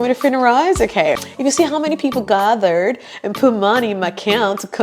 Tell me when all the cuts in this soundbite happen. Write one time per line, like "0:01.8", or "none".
0:01.2